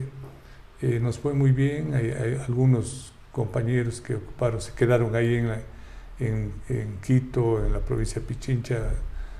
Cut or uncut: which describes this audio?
uncut